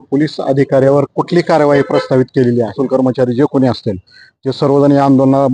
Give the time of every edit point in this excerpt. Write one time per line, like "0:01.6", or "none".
0:02.8